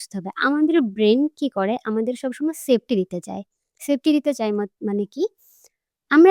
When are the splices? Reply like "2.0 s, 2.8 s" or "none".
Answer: none